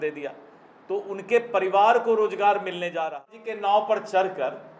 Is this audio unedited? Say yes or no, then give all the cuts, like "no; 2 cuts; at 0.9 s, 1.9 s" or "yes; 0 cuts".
no; 1 cut; at 3.2 s